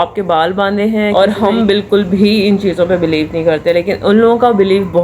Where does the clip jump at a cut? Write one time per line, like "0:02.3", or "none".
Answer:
0:01.1